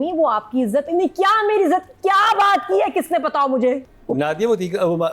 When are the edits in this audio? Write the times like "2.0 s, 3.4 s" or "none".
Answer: 3.9 s